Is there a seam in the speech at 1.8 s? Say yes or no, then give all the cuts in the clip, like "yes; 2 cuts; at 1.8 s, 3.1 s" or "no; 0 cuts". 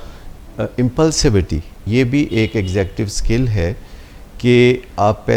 yes; 1 cut; at 1.8 s